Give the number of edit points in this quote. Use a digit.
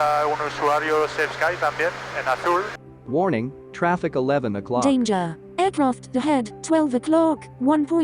1